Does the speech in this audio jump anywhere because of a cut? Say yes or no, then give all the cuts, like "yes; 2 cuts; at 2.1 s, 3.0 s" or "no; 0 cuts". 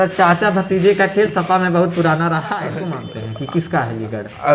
yes; 1 cut; at 2.7 s